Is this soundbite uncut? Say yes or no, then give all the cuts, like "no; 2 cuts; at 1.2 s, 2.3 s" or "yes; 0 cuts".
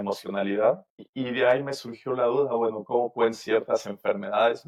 yes; 0 cuts